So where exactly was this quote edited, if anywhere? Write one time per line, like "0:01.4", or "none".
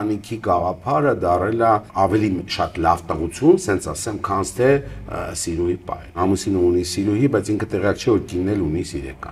0:01.9
0:06.2